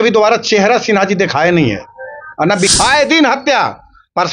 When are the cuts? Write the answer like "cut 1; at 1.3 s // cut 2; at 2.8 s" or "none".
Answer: cut 1; at 2.7 s